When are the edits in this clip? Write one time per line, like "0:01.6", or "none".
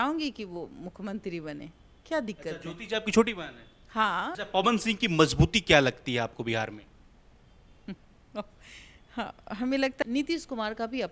0:04.3
0:10.0